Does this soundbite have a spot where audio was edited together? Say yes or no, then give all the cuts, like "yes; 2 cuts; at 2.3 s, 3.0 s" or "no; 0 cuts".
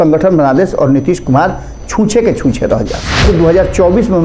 yes; 1 cut; at 3.2 s